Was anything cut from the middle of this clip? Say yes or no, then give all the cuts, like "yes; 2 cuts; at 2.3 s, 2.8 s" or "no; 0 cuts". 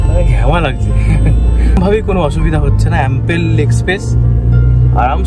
yes; 1 cut; at 1.7 s